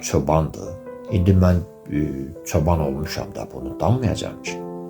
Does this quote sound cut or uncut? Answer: uncut